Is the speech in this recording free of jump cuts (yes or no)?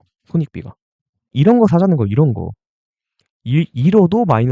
no